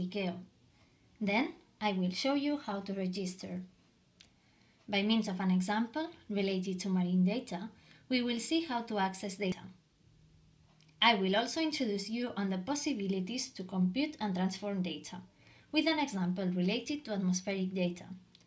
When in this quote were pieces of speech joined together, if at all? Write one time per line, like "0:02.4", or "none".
0:09.5